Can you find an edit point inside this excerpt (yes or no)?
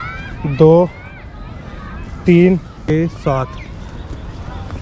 yes